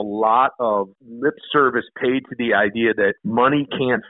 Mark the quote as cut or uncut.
cut